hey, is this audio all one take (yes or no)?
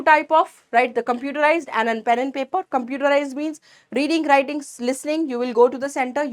yes